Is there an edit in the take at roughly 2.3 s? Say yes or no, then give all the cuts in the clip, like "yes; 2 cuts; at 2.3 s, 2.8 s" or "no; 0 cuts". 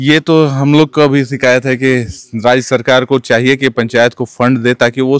no; 0 cuts